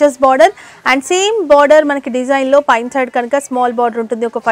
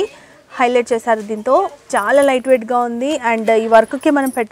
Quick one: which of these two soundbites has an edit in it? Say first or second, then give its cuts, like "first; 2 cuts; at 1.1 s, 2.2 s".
second; 1 cut; at 1.9 s